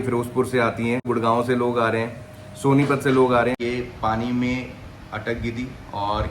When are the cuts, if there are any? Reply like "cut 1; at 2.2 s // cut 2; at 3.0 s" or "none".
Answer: cut 1; at 1.1 s // cut 2; at 3.6 s